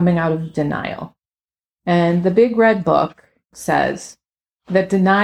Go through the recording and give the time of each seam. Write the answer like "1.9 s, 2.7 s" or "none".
3.5 s